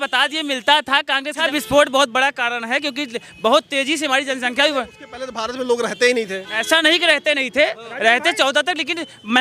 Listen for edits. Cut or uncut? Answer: cut